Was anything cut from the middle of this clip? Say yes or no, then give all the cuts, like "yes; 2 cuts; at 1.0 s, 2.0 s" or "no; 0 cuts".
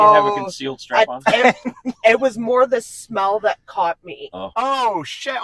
no; 0 cuts